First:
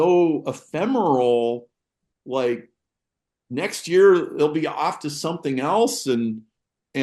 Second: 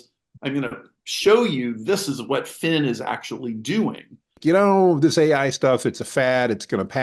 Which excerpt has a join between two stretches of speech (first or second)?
second